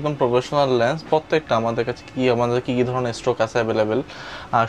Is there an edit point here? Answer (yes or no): no